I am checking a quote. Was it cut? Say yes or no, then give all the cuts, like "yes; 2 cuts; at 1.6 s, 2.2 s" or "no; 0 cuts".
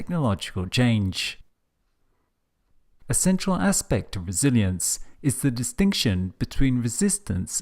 yes; 1 cut; at 3.4 s